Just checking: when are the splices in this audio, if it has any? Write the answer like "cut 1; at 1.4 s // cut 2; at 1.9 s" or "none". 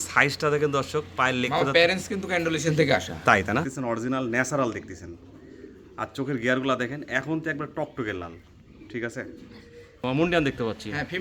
cut 1; at 3.7 s // cut 2; at 10.0 s